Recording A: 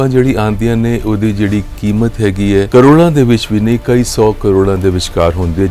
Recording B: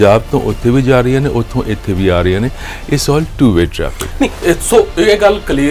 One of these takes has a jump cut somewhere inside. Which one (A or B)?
A